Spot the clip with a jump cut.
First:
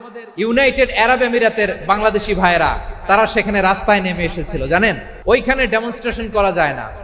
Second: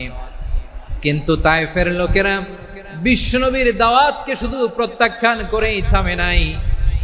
first; 1 cut; at 5.1 s

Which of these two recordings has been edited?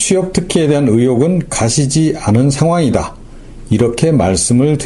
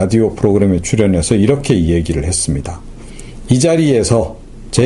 second; 1 cut; at 2.6 s

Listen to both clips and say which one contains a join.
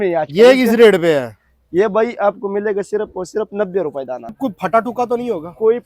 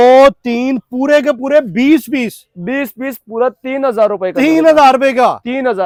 first; 1 cut; at 4.4 s

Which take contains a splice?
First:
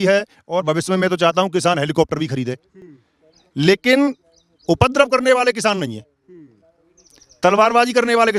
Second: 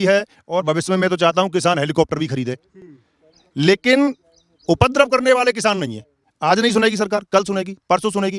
second; 1 cut; at 6.3 s

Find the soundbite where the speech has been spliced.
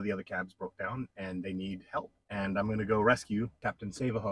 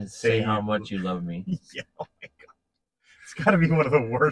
first; 2 cuts; at 2.2 s, 3.5 s

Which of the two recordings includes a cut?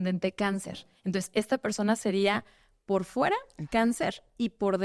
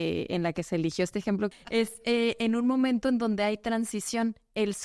second; 1 cut; at 1.5 s

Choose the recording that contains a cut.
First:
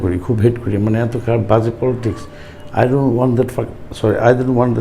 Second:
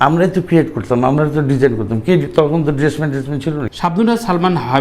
second; 1 cut; at 3.6 s

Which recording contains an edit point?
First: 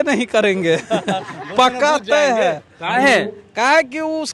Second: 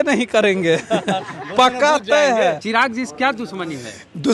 second; 1 cut; at 2.6 s

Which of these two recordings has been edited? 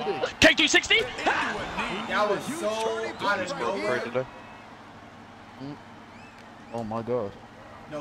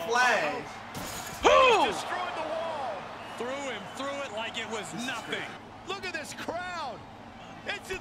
second; 1 cut; at 5.6 s

